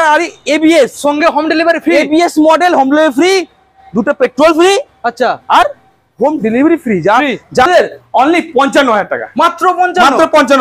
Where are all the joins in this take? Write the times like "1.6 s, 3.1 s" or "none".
7.6 s